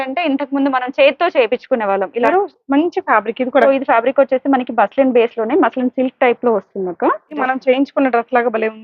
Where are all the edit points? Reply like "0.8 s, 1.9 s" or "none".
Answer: 2.3 s, 3.7 s, 7.5 s